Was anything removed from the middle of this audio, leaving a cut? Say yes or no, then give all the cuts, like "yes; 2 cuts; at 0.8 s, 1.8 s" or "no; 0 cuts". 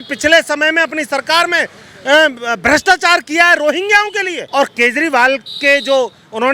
yes; 1 cut; at 4.3 s